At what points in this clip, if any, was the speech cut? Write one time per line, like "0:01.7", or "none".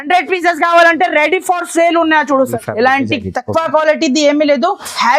0:02.5